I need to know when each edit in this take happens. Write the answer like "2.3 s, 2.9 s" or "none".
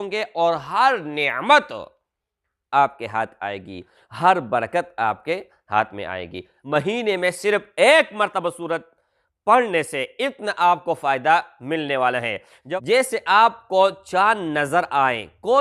6.5 s, 12.5 s